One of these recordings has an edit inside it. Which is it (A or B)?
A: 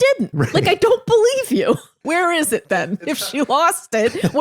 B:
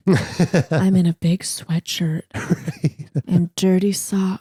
A